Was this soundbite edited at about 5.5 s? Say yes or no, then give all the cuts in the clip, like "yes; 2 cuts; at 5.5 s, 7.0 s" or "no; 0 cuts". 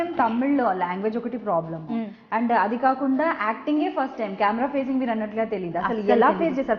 no; 0 cuts